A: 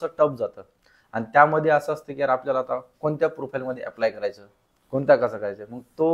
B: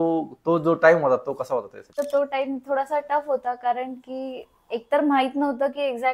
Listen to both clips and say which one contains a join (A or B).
B